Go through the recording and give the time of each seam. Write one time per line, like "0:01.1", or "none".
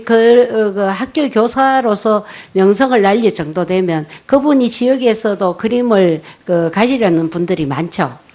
0:06.0